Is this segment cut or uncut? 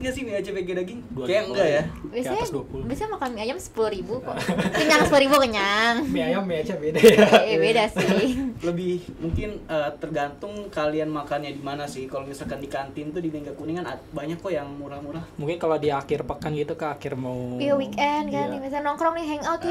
uncut